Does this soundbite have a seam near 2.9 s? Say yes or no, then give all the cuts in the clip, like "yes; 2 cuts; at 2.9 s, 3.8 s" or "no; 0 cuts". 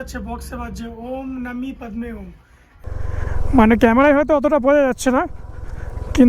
yes; 1 cut; at 2.9 s